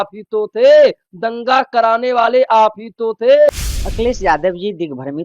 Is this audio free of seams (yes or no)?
no